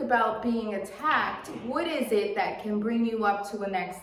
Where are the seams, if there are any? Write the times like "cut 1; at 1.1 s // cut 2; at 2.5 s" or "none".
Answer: none